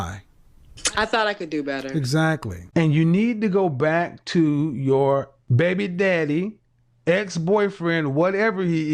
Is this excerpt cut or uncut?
cut